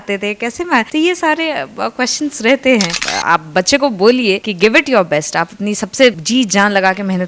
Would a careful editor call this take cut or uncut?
cut